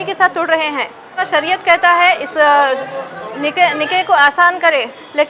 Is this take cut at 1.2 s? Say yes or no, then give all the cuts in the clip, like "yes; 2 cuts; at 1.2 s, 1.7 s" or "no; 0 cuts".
yes; 1 cut; at 1.2 s